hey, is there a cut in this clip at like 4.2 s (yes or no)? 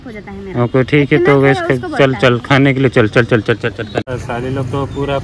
yes